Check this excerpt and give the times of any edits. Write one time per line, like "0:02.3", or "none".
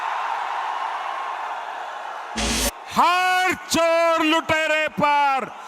0:02.5